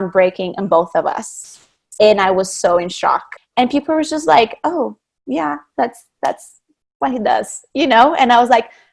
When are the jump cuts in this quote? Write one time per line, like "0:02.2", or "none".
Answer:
0:03.3